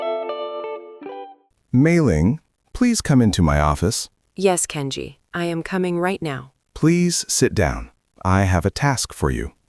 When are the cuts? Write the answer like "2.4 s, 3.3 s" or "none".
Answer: 1.0 s